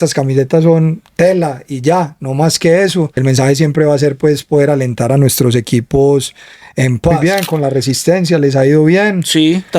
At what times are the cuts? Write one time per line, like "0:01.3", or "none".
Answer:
0:03.2
0:07.2